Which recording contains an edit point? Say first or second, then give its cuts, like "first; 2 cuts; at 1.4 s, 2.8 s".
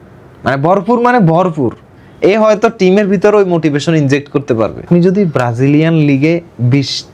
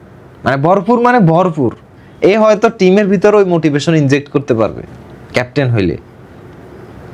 first; 1 cut; at 4.8 s